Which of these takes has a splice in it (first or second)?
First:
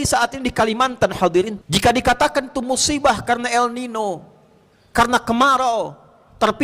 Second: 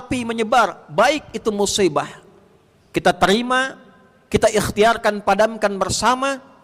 first